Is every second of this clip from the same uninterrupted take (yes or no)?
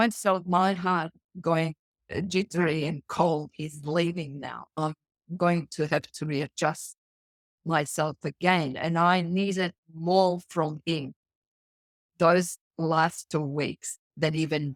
yes